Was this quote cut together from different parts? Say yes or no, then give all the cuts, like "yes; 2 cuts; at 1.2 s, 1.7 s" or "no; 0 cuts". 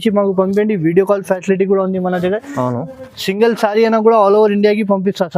no; 0 cuts